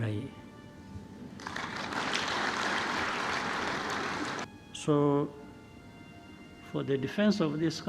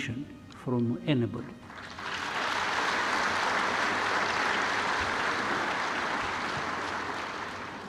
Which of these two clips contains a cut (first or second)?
first